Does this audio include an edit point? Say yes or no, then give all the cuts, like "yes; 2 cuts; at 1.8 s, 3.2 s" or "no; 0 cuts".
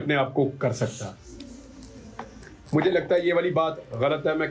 no; 0 cuts